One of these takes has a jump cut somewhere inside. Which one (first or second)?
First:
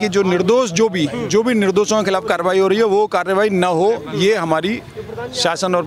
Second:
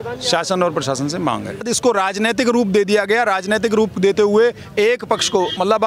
second